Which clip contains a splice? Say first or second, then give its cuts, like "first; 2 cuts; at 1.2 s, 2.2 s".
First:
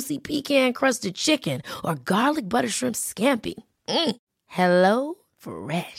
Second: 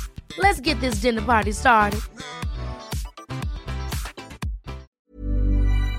second; 1 cut; at 4.9 s